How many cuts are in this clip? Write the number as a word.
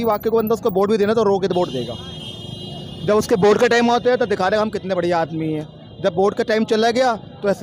zero